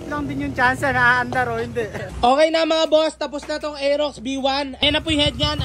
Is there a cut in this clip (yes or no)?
yes